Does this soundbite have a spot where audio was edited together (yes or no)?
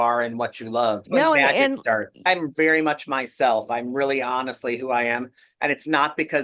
yes